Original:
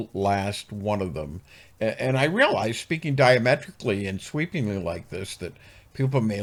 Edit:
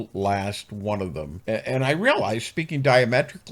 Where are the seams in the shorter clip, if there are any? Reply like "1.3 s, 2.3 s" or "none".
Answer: 1.3 s